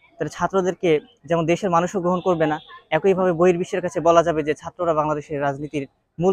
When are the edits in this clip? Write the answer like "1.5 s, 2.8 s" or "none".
none